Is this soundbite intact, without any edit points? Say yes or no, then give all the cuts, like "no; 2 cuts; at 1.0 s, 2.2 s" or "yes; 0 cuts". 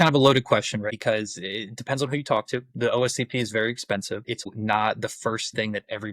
no; 2 cuts; at 0.9 s, 4.5 s